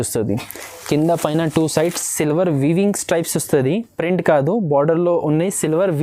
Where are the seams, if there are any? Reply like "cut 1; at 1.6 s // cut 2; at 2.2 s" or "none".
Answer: none